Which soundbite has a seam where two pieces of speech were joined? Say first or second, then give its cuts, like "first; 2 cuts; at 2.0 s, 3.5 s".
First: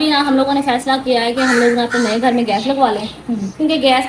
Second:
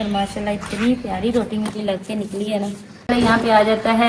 second; 1 cut; at 3.1 s